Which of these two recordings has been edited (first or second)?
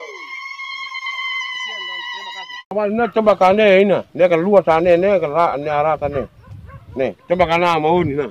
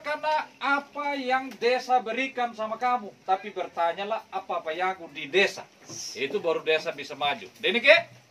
first